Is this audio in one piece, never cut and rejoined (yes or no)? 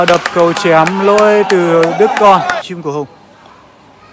no